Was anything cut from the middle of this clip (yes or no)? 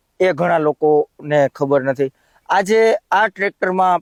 no